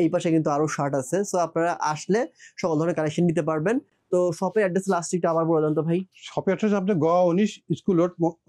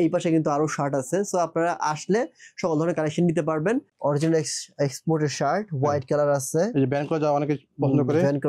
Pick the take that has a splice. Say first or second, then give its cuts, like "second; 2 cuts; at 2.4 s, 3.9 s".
second; 1 cut; at 3.9 s